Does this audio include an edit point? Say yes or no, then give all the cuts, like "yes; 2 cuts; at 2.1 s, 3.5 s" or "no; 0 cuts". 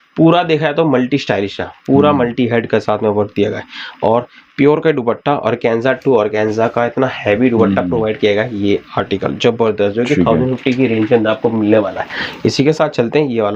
no; 0 cuts